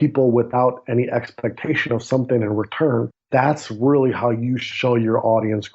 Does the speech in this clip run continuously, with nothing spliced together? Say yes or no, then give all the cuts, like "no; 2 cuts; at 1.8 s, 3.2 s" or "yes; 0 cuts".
no; 2 cuts; at 3.2 s, 4.7 s